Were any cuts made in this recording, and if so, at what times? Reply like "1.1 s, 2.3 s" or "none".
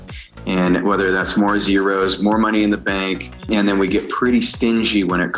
3.5 s